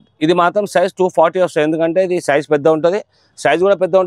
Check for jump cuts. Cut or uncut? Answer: uncut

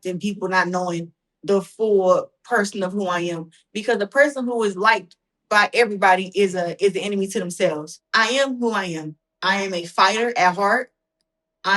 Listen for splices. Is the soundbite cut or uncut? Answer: cut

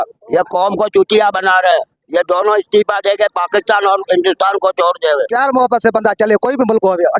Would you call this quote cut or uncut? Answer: cut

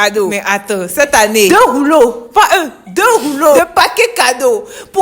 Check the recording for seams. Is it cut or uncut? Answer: cut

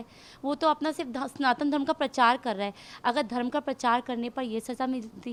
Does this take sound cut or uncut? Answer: uncut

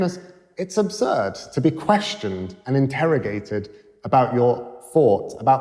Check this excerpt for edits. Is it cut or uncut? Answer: uncut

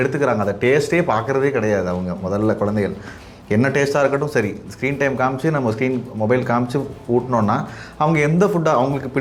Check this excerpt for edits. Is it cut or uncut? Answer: uncut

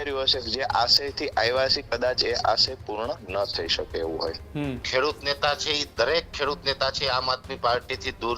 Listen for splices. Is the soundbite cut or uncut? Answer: cut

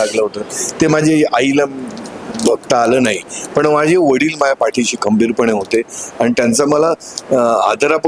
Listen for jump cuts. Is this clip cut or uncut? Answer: uncut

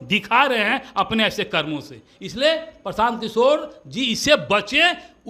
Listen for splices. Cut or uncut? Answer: uncut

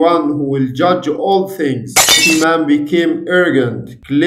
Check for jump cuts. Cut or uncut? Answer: cut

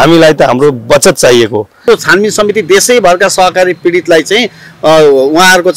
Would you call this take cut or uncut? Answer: cut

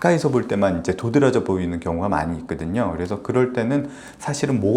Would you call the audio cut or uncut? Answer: uncut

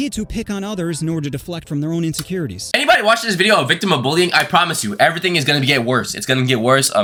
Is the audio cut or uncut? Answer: uncut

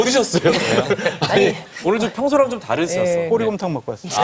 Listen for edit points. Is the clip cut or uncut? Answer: uncut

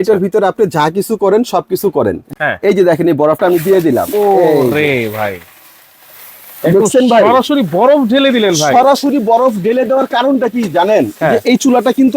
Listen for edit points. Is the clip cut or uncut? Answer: cut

